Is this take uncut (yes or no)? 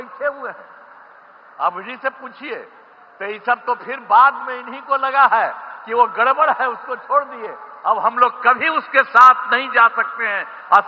yes